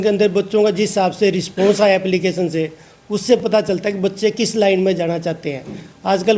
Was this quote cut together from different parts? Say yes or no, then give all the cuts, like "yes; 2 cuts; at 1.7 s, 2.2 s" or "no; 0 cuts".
no; 0 cuts